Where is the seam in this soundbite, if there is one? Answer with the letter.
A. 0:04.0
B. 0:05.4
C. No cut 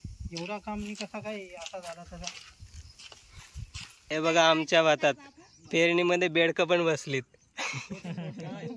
A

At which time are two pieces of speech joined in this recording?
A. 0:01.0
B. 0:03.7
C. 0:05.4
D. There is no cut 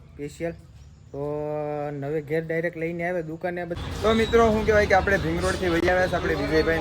B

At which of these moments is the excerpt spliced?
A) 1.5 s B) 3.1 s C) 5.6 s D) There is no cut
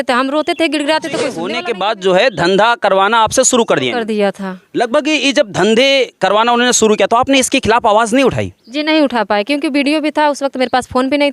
A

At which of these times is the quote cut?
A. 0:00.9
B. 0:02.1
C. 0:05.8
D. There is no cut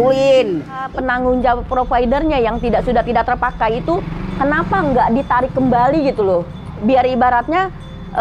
A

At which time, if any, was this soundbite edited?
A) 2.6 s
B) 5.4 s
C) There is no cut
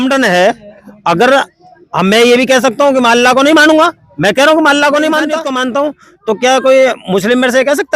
B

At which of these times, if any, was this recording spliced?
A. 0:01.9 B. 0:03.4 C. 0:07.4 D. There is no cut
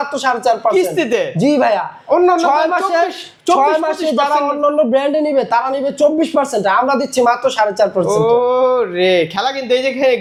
D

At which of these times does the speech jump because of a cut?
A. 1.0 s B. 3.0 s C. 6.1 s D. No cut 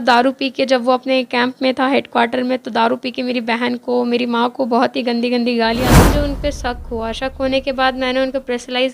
C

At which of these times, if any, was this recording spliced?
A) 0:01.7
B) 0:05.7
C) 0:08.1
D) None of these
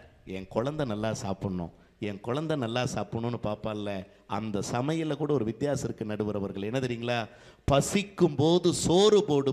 D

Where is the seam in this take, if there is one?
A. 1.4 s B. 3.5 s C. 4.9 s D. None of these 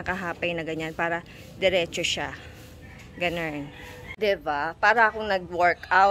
D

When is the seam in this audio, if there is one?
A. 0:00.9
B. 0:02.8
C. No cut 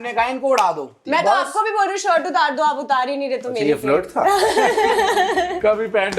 A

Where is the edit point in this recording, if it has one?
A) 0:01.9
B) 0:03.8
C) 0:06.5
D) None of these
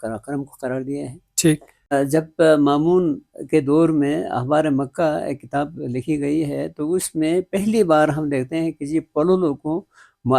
A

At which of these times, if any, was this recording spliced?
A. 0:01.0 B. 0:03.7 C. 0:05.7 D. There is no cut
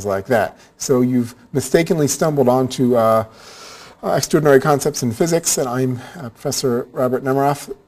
C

